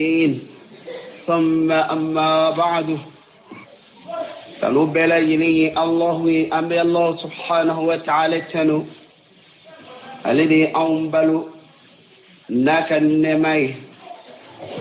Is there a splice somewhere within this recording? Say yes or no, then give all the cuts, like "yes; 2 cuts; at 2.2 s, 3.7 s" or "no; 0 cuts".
no; 0 cuts